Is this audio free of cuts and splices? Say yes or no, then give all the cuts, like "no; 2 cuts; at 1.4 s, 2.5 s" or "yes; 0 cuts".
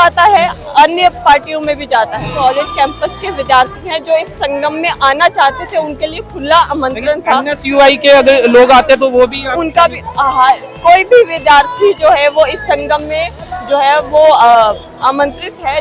no; 1 cut; at 2.3 s